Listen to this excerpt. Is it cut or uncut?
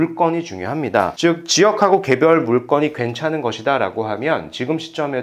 uncut